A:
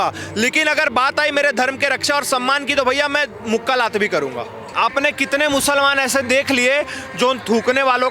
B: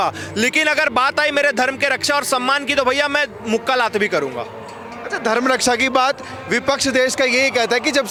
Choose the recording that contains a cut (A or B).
A